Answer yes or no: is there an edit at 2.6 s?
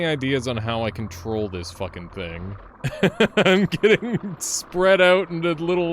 yes